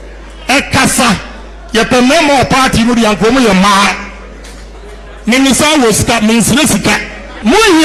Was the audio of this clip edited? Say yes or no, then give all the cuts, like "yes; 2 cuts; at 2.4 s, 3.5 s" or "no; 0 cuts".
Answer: no; 0 cuts